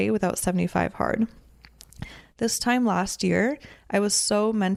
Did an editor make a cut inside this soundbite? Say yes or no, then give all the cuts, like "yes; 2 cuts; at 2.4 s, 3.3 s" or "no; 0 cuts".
no; 0 cuts